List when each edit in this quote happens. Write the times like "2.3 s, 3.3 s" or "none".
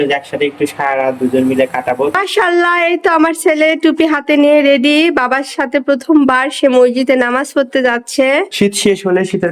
2.1 s, 8.5 s